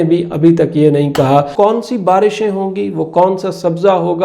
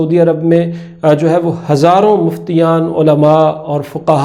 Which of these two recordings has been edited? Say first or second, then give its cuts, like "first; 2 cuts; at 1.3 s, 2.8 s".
first; 1 cut; at 1.5 s